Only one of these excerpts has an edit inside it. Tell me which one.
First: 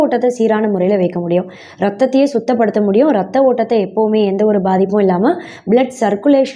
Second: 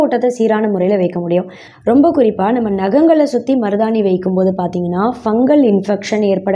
second; 1 cut; at 1.6 s

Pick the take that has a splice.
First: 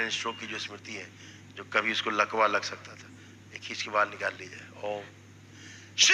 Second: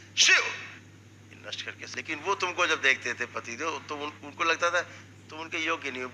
second; 1 cut; at 1.8 s

